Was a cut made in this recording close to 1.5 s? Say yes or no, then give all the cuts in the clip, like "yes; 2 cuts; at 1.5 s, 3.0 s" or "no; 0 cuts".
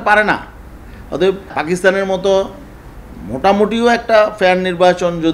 yes; 1 cut; at 1.5 s